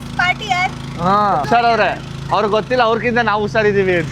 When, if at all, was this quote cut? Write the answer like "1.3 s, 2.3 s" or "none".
1.4 s